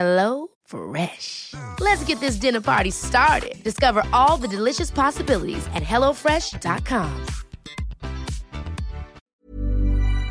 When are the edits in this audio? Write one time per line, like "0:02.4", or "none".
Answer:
0:09.2